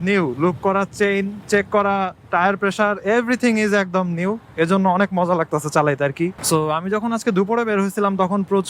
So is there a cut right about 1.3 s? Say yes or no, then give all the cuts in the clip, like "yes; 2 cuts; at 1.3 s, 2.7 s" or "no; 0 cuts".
yes; 2 cuts; at 1.3 s, 6.4 s